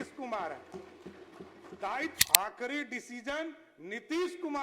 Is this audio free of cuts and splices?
no; 1 cut; at 2.1 s

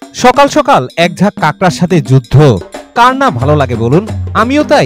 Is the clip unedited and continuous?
yes; 0 cuts

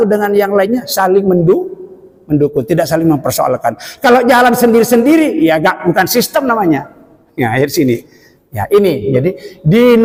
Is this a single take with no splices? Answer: yes; 0 cuts

